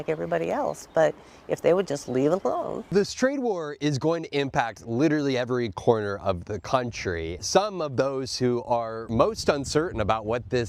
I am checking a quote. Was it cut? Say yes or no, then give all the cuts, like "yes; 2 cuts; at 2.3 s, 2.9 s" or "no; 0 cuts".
no; 0 cuts